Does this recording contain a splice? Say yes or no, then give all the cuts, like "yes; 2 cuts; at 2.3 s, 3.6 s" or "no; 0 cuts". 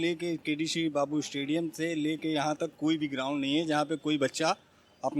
no; 0 cuts